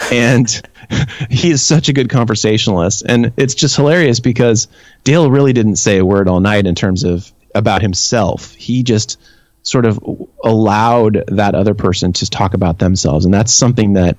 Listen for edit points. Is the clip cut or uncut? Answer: uncut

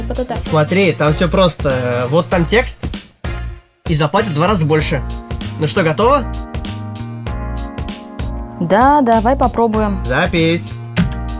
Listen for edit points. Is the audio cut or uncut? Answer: cut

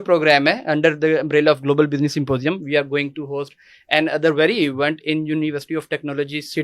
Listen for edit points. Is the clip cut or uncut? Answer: uncut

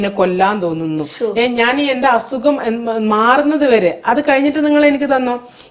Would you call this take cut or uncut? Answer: uncut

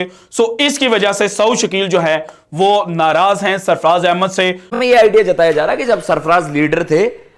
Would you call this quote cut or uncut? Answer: cut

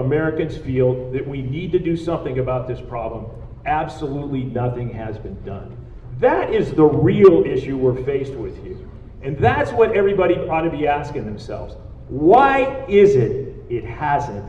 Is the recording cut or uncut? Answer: uncut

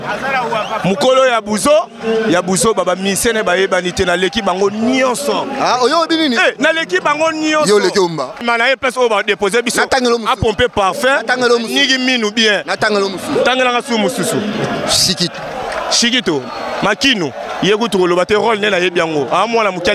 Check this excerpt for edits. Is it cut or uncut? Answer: cut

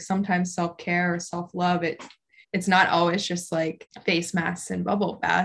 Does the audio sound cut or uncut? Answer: cut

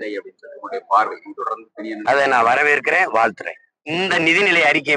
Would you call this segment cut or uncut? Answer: cut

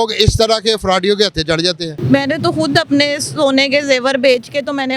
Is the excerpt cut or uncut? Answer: cut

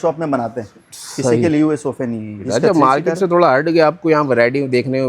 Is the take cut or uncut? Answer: cut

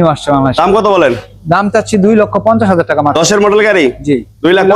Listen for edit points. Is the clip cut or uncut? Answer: uncut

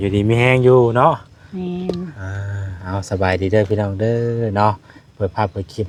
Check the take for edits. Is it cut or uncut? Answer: uncut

